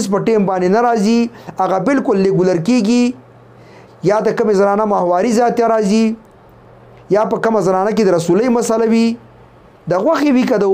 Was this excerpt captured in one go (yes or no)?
yes